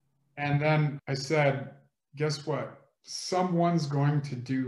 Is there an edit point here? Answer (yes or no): yes